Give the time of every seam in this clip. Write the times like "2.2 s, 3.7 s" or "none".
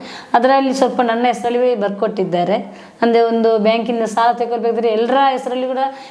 none